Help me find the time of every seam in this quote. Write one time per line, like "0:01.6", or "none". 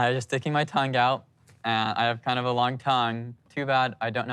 0:03.4